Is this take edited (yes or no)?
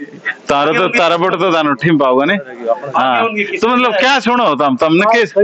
no